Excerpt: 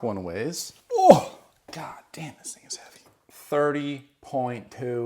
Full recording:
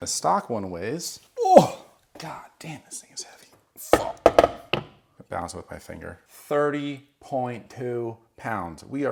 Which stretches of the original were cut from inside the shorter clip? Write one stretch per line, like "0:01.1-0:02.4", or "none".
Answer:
0:03.7-0:06.3